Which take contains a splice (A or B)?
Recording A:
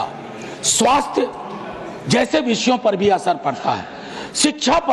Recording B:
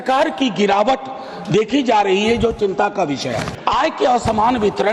B